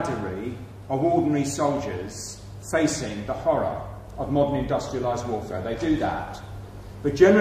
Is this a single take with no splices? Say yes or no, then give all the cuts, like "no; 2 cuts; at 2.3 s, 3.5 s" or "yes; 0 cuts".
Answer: yes; 0 cuts